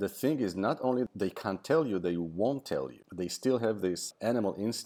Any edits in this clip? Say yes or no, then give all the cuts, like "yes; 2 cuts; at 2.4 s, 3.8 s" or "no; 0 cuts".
yes; 3 cuts; at 1.1 s, 3.0 s, 4.0 s